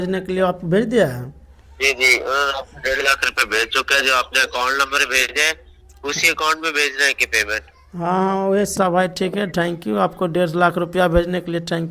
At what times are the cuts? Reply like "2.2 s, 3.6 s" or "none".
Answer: 8.7 s